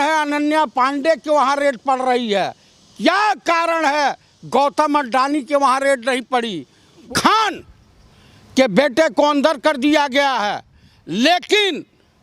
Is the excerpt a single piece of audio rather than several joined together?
no; 1 cut; at 7.1 s

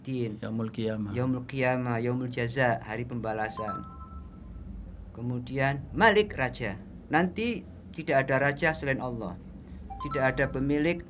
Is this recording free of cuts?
yes; 0 cuts

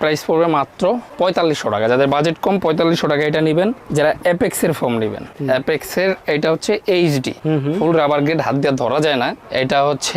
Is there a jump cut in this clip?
no; 0 cuts

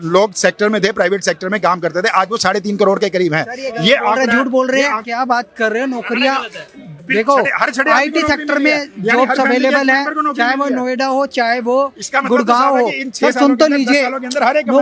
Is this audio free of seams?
yes; 0 cuts

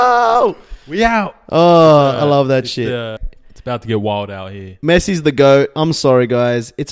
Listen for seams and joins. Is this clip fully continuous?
no; 1 cut; at 3.1 s

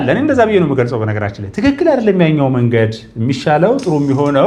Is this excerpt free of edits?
yes; 0 cuts

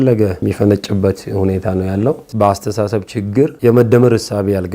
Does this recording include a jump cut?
yes; 2 cuts; at 2.3 s, 3.5 s

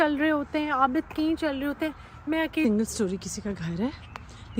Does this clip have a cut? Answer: yes; 1 cut; at 2.6 s

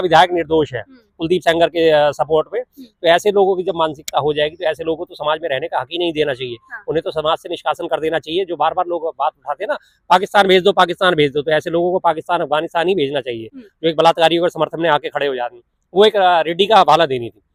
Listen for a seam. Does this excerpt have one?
no; 0 cuts

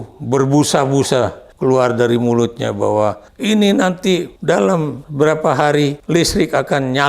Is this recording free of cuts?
no; 5 cuts; at 1.4 s, 3.3 s, 4.3 s, 5.0 s, 6.0 s

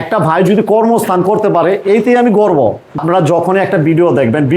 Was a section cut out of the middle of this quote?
yes; 1 cut; at 3.0 s

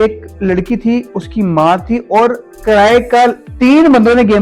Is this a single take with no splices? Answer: no; 1 cut; at 3.4 s

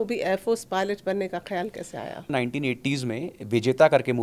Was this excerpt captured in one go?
no; 1 cut; at 2.3 s

